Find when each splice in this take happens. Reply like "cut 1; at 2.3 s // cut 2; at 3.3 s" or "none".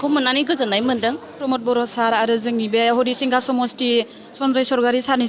cut 1; at 1.4 s // cut 2; at 4.3 s